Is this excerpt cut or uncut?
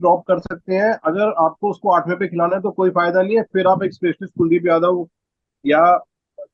uncut